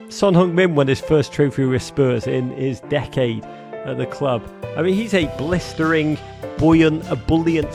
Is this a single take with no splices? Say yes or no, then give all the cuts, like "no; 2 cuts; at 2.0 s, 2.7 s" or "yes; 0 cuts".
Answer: yes; 0 cuts